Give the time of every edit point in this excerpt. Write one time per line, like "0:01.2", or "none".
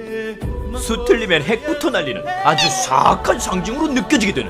0:00.9